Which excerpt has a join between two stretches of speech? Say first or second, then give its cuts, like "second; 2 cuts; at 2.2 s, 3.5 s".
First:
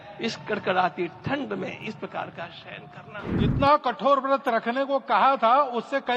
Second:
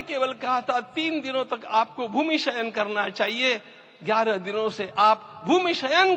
first; 1 cut; at 3.3 s